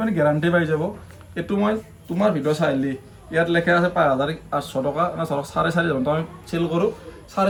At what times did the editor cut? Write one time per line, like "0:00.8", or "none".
none